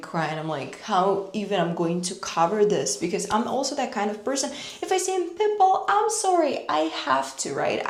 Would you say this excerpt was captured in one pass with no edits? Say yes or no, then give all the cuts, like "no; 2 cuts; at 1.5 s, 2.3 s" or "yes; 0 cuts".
yes; 0 cuts